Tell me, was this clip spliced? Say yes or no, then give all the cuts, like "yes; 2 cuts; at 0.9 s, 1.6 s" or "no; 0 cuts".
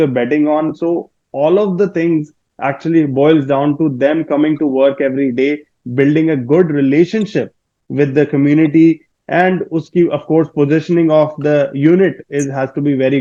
no; 0 cuts